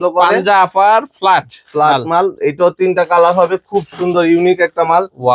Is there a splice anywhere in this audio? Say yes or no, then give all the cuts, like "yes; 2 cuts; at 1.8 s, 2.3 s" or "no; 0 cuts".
no; 0 cuts